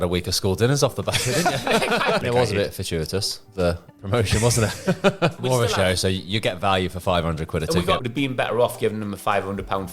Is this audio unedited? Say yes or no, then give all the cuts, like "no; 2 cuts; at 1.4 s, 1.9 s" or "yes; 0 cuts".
no; 3 cuts; at 2.2 s, 5.4 s, 8.0 s